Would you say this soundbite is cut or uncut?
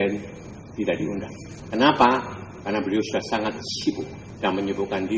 cut